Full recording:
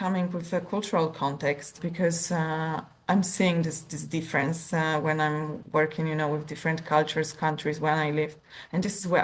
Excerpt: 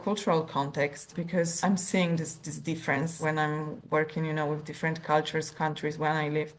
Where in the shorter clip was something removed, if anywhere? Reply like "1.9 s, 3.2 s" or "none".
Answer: 1.5 s, 3.2 s